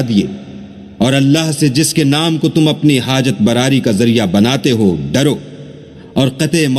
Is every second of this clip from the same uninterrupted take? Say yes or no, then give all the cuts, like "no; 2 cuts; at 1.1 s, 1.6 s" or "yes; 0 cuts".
yes; 0 cuts